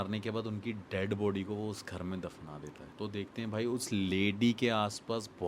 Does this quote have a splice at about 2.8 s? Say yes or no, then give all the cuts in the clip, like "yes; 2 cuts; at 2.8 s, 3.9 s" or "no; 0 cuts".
yes; 1 cut; at 2.8 s